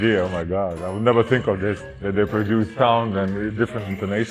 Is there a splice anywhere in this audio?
yes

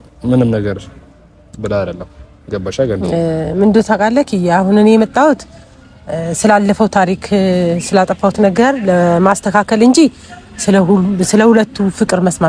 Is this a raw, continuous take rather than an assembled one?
yes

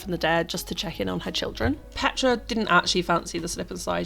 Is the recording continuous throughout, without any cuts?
no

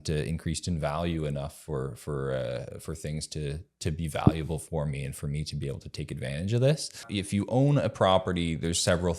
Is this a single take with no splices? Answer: no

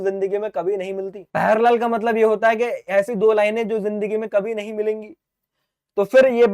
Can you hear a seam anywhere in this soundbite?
yes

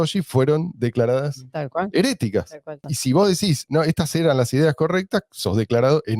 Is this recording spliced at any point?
yes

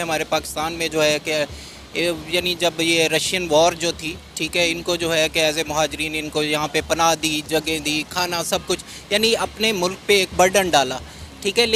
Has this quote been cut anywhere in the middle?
no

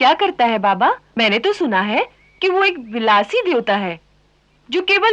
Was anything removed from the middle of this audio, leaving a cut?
yes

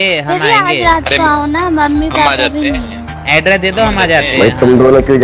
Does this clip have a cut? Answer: no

